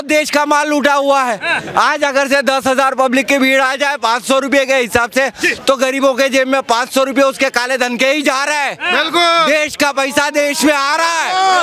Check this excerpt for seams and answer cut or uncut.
uncut